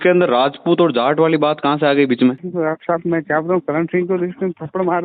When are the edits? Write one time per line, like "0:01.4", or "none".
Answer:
0:02.4